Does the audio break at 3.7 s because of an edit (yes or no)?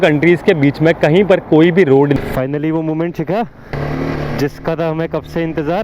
yes